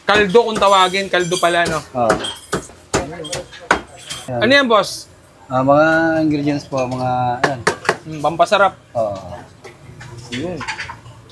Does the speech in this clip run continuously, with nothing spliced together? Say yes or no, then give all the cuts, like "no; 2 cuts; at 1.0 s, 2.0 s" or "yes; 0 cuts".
yes; 0 cuts